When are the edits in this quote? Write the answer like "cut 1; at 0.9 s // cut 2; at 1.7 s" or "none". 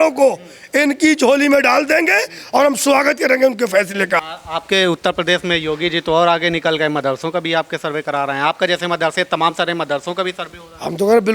cut 1; at 4.2 s